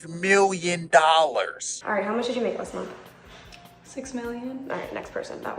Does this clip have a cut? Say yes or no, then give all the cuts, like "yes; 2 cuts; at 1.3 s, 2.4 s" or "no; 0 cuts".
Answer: yes; 1 cut; at 1.7 s